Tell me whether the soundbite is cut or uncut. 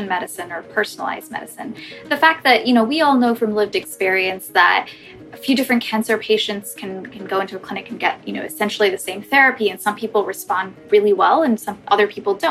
uncut